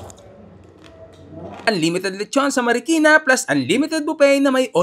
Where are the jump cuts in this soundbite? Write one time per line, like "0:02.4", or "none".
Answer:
0:01.6